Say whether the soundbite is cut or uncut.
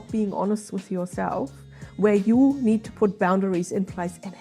uncut